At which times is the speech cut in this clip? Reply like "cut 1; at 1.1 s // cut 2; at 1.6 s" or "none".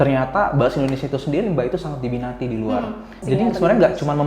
cut 1; at 3.2 s